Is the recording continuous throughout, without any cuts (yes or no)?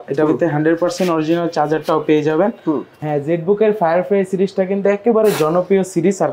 no